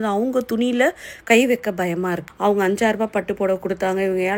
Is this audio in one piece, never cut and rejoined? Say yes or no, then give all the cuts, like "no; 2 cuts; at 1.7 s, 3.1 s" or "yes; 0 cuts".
no; 1 cut; at 2.2 s